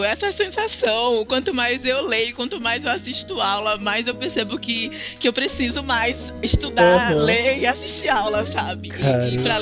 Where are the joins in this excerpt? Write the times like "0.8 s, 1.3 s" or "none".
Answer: none